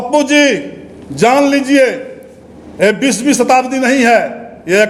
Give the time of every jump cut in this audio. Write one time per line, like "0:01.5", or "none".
none